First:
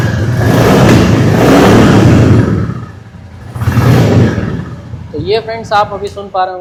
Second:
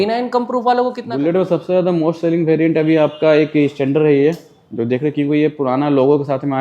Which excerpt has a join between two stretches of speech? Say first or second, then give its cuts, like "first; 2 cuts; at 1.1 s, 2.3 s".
second; 1 cut; at 1.0 s